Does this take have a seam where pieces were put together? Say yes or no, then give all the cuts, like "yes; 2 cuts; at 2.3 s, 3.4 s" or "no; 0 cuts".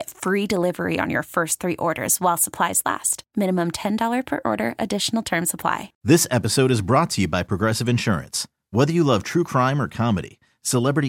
yes; 1 cut; at 5.9 s